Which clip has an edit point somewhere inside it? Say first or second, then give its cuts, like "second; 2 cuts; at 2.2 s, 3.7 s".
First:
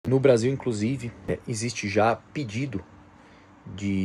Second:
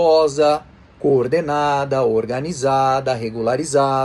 first; 1 cut; at 1.3 s